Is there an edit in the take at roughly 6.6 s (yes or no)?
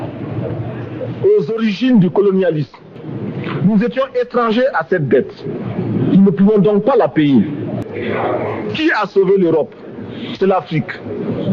no